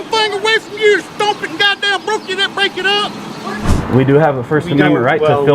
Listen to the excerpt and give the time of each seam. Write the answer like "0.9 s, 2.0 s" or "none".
3.3 s

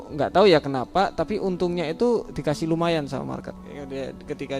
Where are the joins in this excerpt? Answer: 3.5 s

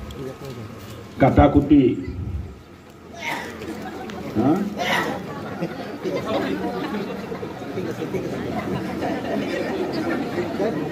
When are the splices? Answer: none

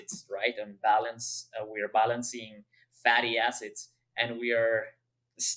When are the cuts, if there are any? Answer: none

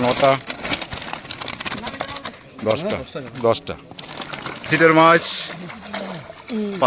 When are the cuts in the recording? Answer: 1.7 s, 4.7 s

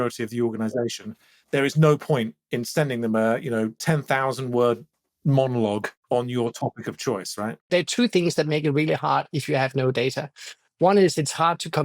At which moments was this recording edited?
5.9 s, 7.6 s

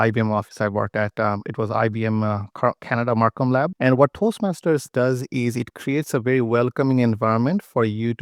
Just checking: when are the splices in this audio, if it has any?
3.7 s

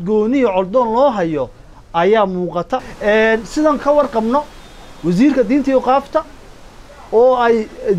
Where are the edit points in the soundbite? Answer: 2.8 s

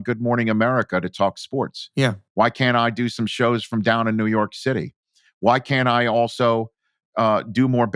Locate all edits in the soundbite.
none

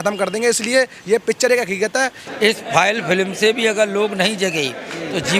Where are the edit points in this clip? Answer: 2.2 s

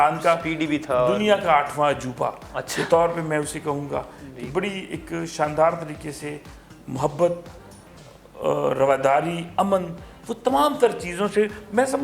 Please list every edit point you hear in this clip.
none

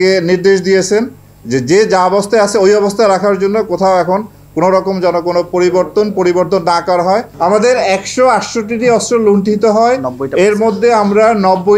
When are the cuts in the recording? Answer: 7.3 s

